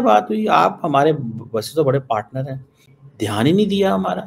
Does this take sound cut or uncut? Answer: uncut